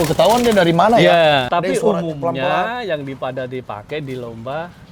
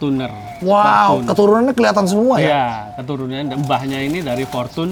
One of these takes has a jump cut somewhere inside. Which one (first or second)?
first